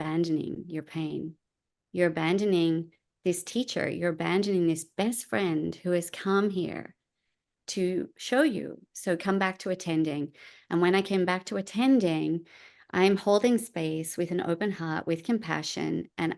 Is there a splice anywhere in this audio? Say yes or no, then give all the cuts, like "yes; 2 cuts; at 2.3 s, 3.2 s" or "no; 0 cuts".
no; 0 cuts